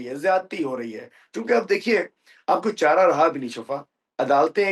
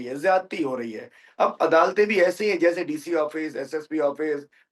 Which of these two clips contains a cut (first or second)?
second